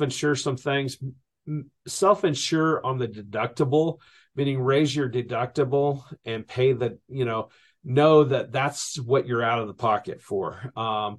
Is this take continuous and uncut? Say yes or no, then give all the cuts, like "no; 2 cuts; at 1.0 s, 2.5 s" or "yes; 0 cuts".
yes; 0 cuts